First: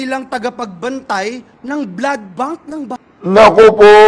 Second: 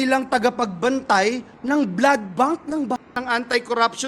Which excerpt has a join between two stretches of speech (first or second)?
second